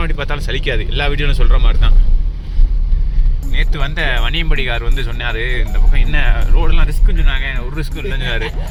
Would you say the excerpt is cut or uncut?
uncut